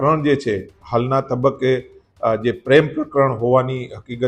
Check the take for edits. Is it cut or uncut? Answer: uncut